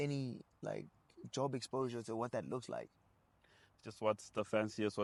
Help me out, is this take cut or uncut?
uncut